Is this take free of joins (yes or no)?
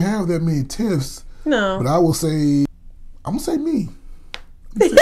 no